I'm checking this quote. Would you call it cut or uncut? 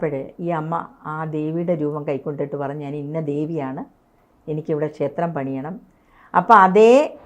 uncut